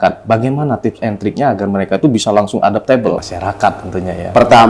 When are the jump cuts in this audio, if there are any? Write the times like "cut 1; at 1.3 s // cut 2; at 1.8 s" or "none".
cut 1; at 3.3 s